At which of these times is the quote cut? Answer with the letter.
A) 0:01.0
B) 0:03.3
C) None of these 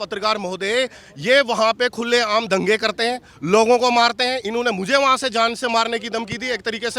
C